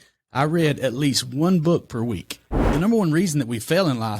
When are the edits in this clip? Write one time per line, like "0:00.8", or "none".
0:02.6